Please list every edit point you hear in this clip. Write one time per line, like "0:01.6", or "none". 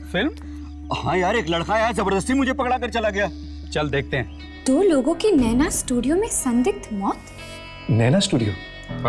0:04.4
0:07.8